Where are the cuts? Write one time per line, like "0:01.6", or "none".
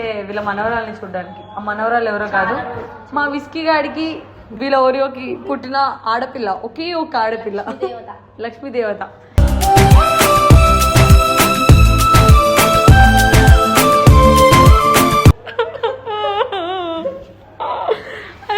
0:15.4